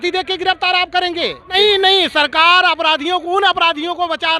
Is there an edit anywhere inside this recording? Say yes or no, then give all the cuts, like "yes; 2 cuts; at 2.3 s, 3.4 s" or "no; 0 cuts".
yes; 1 cut; at 1.5 s